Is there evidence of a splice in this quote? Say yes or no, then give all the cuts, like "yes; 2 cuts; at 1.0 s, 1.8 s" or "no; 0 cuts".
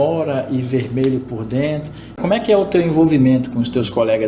yes; 1 cut; at 2.2 s